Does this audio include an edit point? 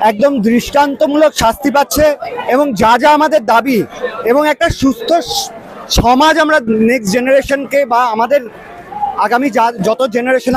no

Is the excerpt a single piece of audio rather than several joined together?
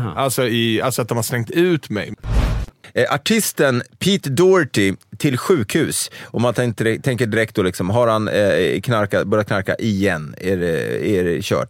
no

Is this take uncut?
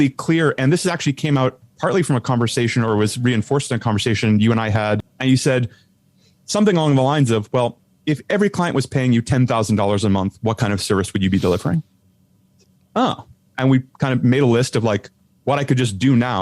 no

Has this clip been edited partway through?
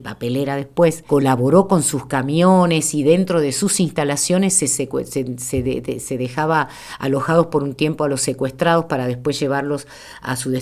no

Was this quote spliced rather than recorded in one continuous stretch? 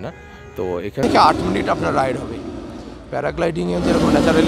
yes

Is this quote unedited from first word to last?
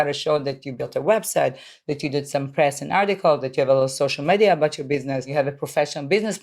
no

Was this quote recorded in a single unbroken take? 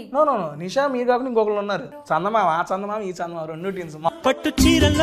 no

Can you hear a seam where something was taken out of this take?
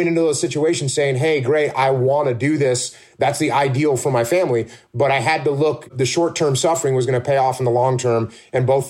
yes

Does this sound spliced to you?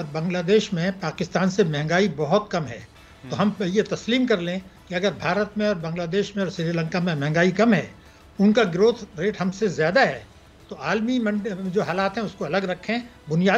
no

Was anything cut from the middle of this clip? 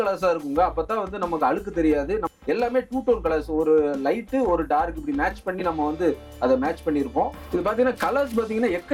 yes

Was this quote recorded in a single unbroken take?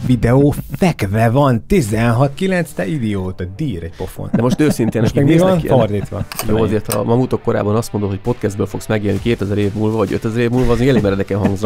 no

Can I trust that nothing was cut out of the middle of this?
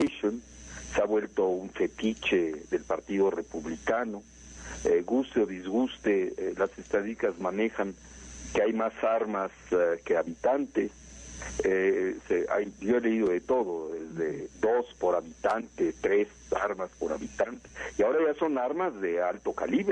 no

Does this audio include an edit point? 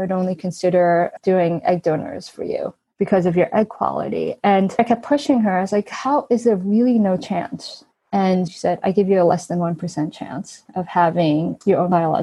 yes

